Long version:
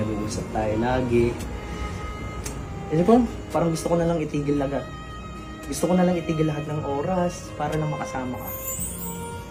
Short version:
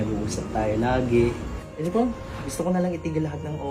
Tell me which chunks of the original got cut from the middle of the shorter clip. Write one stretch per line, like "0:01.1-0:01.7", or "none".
0:01.6-0:02.7
0:03.4-0:05.5